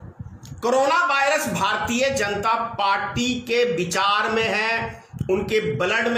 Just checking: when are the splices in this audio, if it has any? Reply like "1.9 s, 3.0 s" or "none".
none